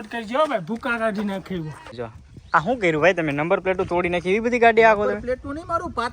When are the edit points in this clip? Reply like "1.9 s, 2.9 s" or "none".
1.9 s